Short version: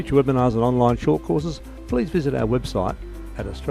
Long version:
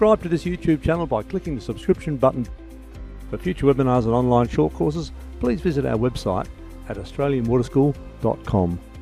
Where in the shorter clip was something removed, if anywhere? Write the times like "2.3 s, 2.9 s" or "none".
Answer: none